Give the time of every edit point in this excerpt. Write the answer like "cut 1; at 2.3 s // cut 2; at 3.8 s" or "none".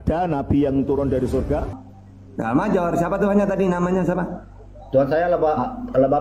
cut 1; at 1.7 s